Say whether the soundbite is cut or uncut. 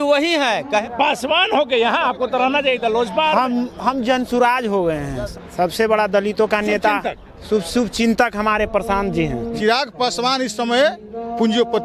cut